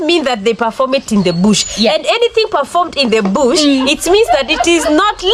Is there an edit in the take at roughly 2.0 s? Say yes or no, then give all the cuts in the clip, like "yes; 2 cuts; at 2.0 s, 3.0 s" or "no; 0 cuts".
no; 0 cuts